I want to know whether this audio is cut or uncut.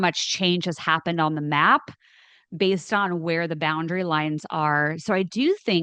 uncut